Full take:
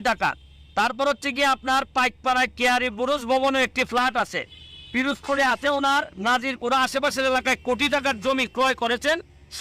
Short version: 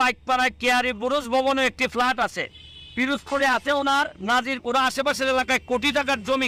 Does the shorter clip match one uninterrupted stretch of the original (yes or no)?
yes